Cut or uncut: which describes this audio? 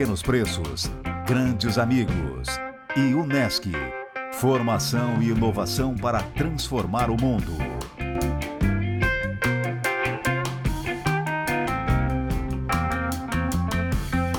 uncut